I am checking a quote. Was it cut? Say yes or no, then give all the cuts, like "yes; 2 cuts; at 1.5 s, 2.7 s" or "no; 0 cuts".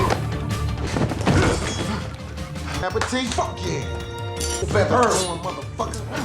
yes; 1 cut; at 4.6 s